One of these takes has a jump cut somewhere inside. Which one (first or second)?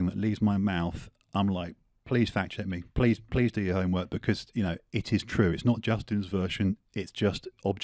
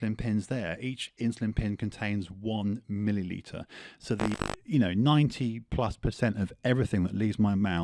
second